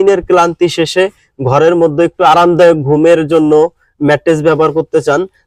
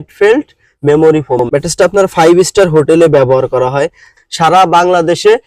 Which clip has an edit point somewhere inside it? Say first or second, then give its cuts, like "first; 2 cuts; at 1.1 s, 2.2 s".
second; 2 cuts; at 1.4 s, 4.1 s